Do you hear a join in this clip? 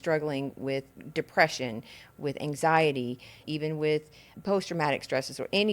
yes; 3 cuts; at 1.0 s, 3.4 s, 4.3 s

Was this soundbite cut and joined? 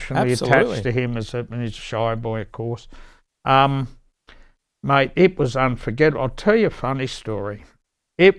no; 0 cuts

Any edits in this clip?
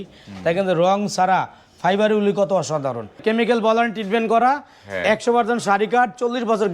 yes; 1 cut; at 3.2 s

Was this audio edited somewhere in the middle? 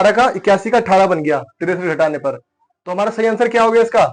no; 0 cuts

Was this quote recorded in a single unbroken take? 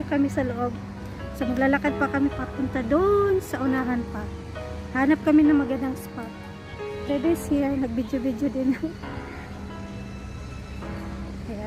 yes; 0 cuts

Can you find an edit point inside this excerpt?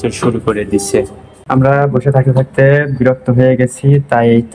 yes; 1 cut; at 1.2 s

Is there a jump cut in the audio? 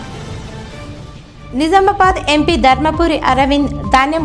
yes; 1 cut; at 1.2 s

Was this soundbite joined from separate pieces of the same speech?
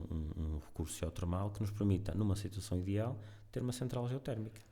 no; 0 cuts

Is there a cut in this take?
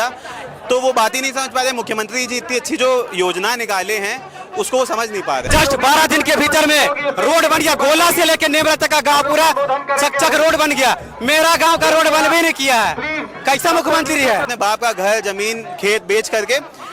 yes; 2 cuts; at 5.5 s, 14.4 s

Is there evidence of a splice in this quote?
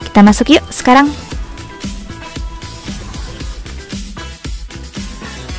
yes; 1 cut; at 1.1 s

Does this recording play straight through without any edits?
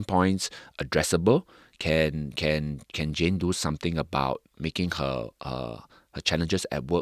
yes; 0 cuts

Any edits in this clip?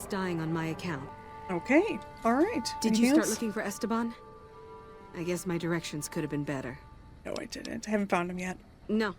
yes; 1 cut; at 1.2 s

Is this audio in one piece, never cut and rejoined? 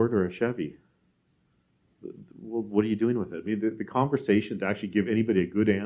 yes; 0 cuts

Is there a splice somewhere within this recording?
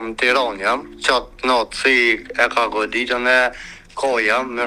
yes; 1 cut; at 0.9 s

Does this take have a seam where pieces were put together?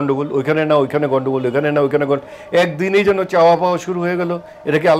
no; 0 cuts

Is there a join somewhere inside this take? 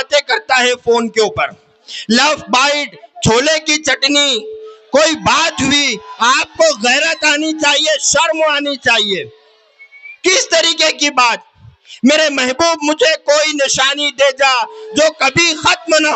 no; 0 cuts

